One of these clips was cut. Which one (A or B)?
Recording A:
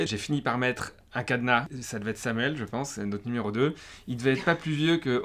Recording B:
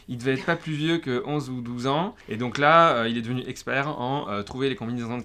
A